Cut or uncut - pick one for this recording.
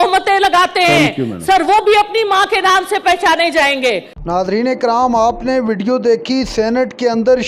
uncut